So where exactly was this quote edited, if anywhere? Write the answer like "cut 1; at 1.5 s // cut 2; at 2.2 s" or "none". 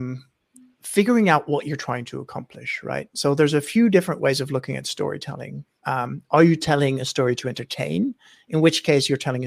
none